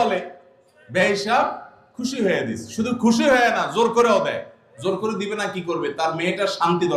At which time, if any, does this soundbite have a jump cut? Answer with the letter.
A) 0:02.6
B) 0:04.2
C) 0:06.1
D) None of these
D